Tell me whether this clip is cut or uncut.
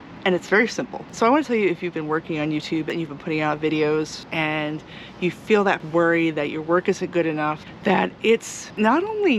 cut